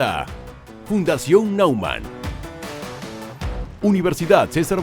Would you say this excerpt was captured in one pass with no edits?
no; 1 cut; at 3.7 s

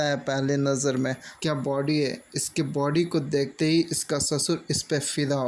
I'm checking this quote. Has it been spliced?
yes; 1 cut; at 1.3 s

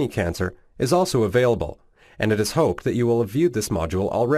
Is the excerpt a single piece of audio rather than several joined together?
yes; 0 cuts

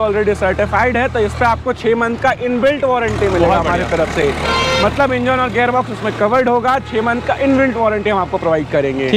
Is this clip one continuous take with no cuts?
yes; 0 cuts

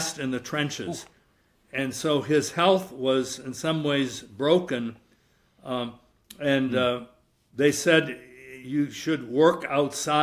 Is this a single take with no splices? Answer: yes; 0 cuts

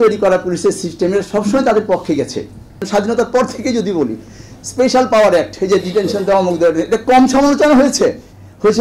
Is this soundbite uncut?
no; 1 cut; at 2.8 s

